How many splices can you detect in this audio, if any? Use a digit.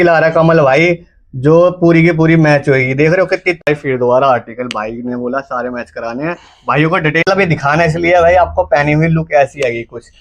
2